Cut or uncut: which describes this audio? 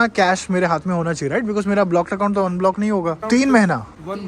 cut